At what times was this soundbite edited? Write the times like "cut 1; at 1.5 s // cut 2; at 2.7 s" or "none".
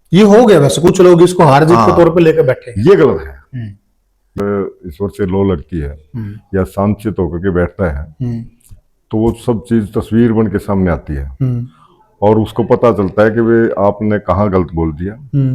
cut 1; at 4.3 s